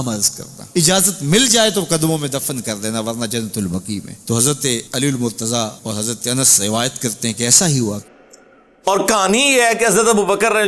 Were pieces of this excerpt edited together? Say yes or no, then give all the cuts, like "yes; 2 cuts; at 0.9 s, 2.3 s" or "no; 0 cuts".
yes; 1 cut; at 8.0 s